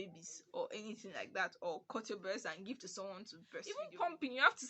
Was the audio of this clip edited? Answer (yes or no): yes